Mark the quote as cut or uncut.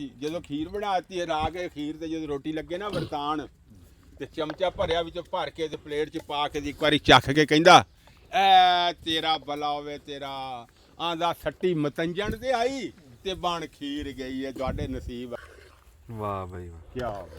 cut